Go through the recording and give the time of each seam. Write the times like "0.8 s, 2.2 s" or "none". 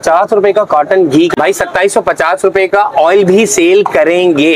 none